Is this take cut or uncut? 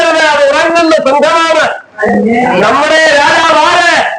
cut